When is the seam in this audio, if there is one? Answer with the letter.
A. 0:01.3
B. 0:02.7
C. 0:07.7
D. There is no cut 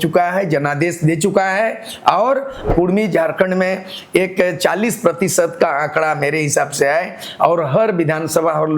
B